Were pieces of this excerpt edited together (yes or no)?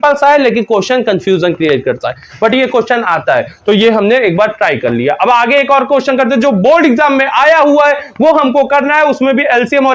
no